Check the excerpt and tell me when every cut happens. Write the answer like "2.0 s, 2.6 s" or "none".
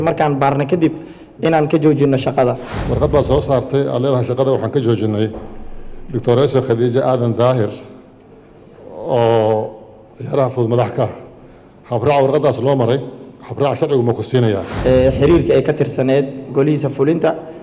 2.7 s, 14.7 s